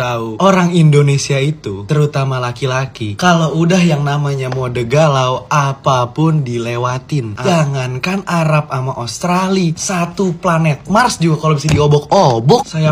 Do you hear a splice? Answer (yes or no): yes